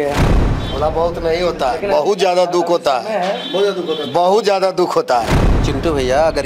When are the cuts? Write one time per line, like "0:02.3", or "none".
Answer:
0:05.4